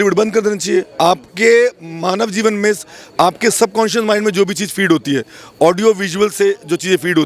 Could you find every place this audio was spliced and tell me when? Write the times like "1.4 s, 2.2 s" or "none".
none